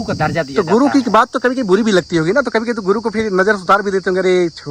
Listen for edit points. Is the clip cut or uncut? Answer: uncut